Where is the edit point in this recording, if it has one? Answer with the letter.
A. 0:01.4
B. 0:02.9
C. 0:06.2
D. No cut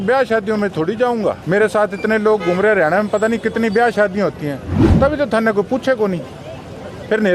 A